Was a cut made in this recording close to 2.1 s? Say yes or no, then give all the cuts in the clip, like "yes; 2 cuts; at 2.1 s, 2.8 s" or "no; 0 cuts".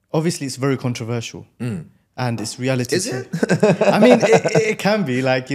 no; 0 cuts